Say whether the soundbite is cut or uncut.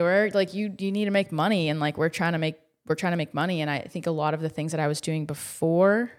uncut